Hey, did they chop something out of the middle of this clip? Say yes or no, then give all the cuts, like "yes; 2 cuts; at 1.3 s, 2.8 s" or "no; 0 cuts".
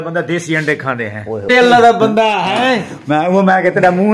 yes; 1 cut; at 1.5 s